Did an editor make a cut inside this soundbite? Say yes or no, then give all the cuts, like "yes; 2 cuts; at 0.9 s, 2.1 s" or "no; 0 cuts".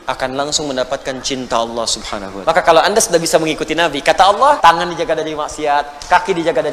yes; 2 cuts; at 2.2 s, 4.6 s